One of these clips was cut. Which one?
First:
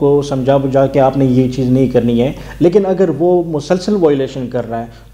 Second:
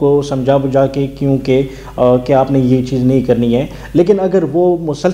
first; 1 cut; at 0.9 s

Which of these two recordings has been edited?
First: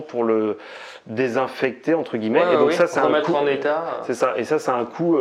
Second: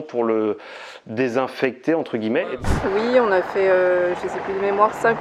second; 1 cut; at 2.4 s

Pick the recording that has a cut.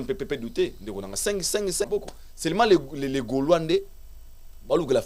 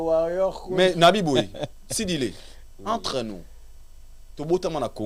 first; 1 cut; at 1.9 s

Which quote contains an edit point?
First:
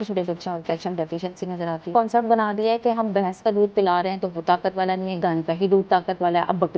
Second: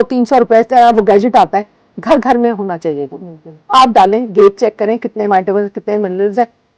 first; 1 cut; at 1.9 s

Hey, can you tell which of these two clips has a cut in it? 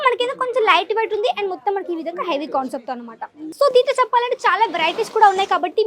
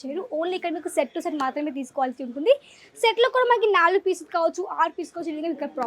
first; 1 cut; at 3.4 s

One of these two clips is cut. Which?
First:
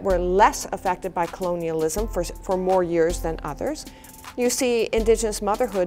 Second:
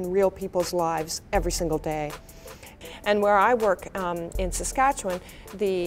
second; 1 cut; at 2.8 s

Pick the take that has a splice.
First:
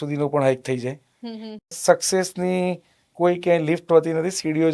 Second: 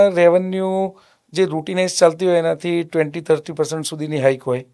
first; 1 cut; at 1.7 s

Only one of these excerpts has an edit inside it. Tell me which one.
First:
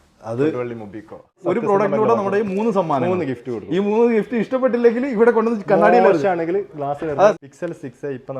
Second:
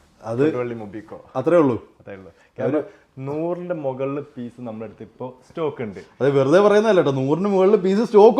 first; 2 cuts; at 1.4 s, 7.3 s

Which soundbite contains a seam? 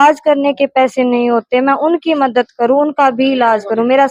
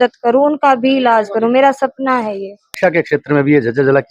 second; 1 cut; at 2.7 s

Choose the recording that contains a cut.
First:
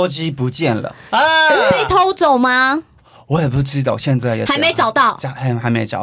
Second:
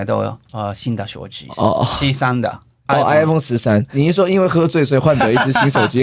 second; 3 cuts; at 1.4 s, 2.8 s, 3.9 s

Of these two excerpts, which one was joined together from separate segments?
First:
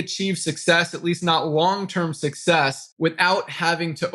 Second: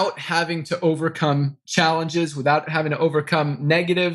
second; 1 cut; at 2.7 s

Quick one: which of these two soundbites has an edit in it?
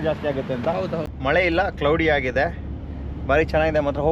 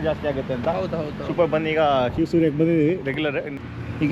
first; 1 cut; at 1.1 s

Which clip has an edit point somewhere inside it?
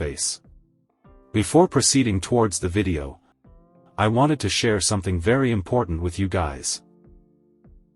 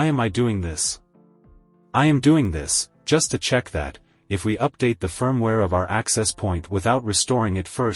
first; 1 cut; at 6.7 s

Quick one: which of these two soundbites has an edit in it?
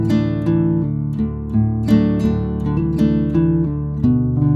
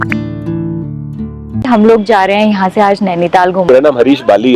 second; 2 cuts; at 1.7 s, 3.7 s

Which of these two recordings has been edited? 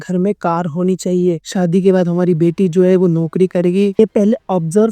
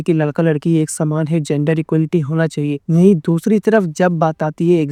first; 2 cuts; at 1.4 s, 4.0 s

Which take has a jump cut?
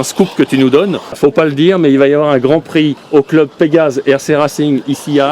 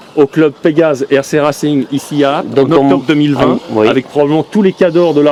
first; 1 cut; at 1.2 s

